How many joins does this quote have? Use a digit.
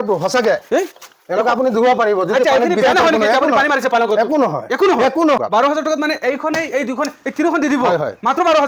1